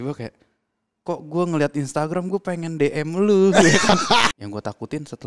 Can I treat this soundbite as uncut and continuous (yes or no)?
no